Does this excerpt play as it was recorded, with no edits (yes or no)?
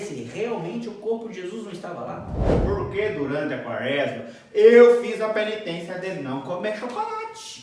no